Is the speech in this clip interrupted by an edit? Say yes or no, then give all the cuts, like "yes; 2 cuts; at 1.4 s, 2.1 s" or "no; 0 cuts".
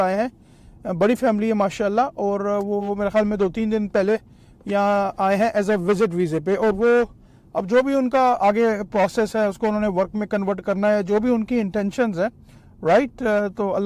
no; 0 cuts